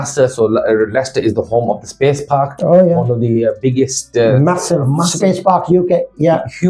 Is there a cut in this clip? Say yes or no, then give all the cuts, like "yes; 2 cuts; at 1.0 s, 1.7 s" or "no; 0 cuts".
no; 0 cuts